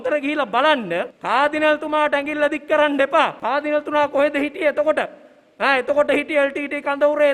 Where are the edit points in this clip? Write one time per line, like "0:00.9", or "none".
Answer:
0:01.2
0:03.4